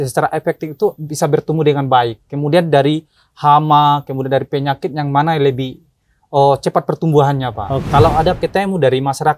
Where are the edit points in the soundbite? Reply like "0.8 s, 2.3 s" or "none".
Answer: 7.7 s